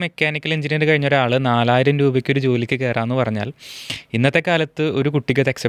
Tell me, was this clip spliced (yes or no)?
no